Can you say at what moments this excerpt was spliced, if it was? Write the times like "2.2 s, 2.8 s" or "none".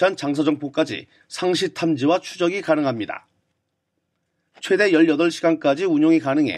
4.4 s